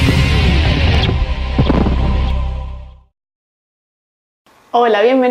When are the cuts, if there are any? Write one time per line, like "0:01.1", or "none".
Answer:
0:01.0